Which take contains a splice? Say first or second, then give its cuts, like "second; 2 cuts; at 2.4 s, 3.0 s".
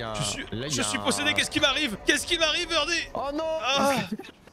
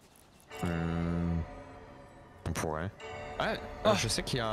first; 1 cut; at 2.0 s